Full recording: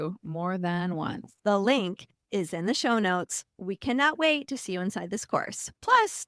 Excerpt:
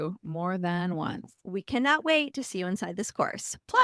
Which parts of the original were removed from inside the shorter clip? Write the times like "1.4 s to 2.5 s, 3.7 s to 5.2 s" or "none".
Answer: 1.3 s to 3.4 s